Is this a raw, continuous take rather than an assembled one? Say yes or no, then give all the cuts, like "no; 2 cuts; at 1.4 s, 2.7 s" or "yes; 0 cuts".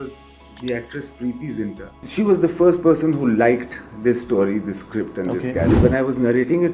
no; 2 cuts; at 1.9 s, 5.8 s